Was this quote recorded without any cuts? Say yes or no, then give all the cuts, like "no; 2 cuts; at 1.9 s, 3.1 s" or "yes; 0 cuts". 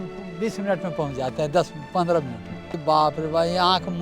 no; 1 cut; at 2.6 s